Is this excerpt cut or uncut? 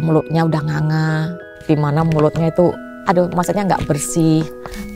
cut